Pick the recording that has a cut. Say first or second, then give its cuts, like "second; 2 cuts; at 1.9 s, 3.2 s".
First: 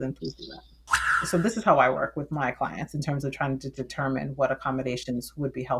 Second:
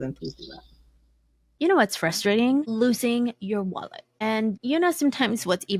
first; 1 cut; at 1.2 s